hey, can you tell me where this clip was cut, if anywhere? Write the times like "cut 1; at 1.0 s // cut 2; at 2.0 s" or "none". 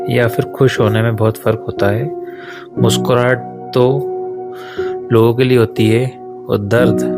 none